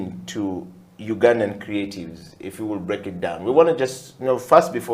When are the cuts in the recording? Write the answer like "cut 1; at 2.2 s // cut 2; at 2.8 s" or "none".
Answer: none